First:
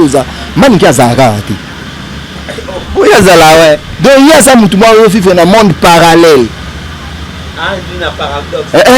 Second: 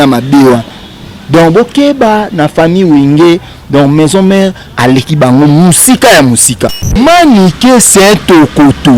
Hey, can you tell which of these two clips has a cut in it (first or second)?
second